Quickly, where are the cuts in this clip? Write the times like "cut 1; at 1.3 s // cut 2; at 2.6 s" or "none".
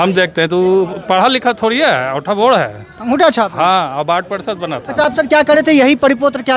none